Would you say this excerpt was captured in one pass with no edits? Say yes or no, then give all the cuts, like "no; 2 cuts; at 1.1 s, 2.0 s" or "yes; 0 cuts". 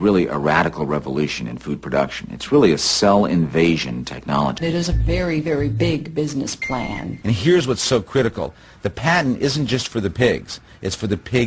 no; 2 cuts; at 4.6 s, 7.1 s